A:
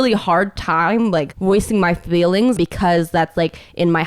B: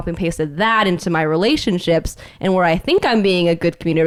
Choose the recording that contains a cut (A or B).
A